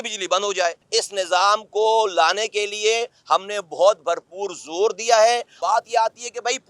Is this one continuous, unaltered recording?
no; 2 cuts; at 0.8 s, 5.5 s

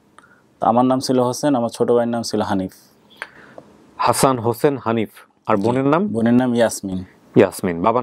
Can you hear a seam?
no; 0 cuts

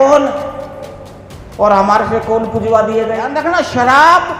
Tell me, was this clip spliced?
yes; 1 cut; at 3.4 s

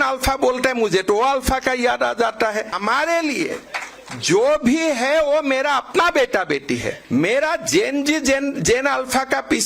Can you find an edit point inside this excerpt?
yes; 2 cuts; at 2.7 s, 6.9 s

